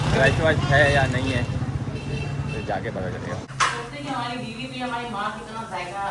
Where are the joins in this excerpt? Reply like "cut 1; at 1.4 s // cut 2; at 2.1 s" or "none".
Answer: cut 1; at 3.5 s